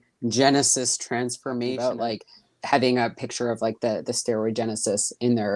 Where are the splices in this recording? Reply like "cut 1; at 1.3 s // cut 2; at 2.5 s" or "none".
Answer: cut 1; at 1.8 s